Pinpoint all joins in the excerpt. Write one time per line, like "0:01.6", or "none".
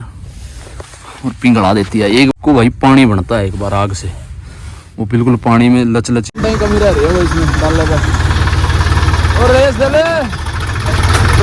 0:02.3
0:06.3

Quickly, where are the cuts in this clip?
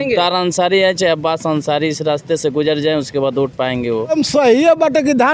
0:04.1

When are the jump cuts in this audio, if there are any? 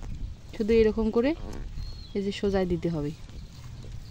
none

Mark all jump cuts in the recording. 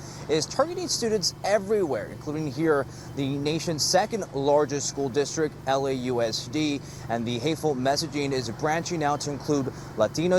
none

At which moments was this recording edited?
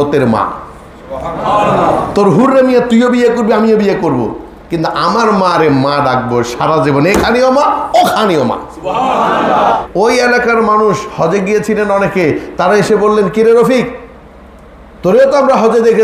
0:09.9

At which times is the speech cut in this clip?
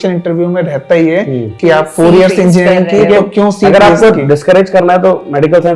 none

